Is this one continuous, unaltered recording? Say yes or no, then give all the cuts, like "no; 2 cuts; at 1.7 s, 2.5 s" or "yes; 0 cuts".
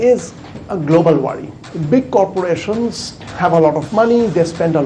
yes; 0 cuts